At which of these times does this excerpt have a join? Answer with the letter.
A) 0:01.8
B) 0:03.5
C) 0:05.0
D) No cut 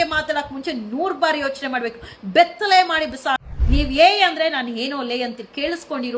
B